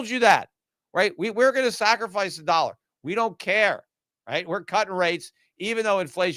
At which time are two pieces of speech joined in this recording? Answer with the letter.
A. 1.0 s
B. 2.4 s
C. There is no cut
C